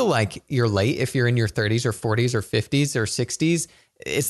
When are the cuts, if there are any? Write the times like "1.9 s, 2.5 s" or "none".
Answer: none

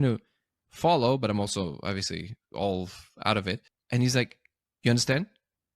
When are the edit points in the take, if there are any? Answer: 3.7 s

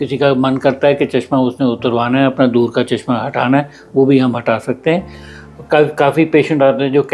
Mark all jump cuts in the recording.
5.2 s

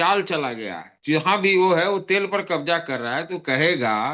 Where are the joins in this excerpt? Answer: 0.9 s

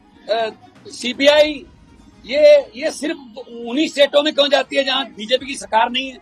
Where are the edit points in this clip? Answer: none

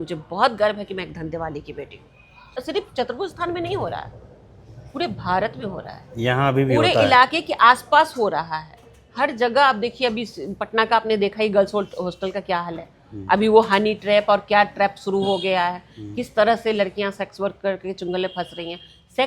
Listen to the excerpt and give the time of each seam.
2.6 s

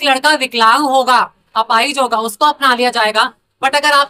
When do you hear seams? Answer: none

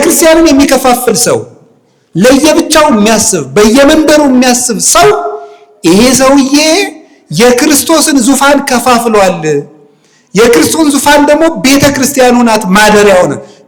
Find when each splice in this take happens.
none

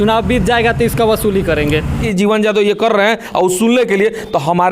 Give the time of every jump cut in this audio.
2.1 s

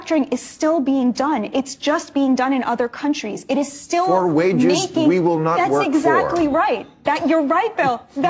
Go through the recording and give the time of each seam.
none

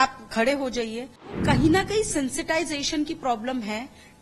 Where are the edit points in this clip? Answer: 1.3 s

